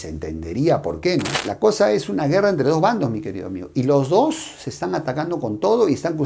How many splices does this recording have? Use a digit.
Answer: 1